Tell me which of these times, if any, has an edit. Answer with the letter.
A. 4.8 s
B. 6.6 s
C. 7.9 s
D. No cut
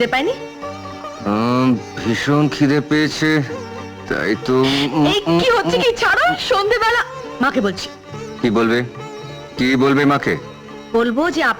D